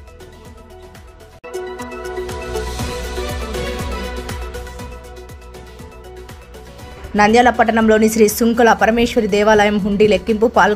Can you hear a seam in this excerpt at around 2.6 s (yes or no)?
no